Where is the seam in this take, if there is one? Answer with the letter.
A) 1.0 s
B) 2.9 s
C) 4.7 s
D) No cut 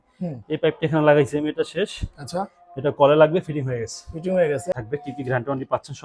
C